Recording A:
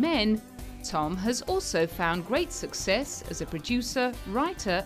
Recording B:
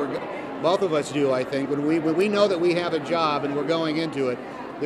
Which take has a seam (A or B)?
A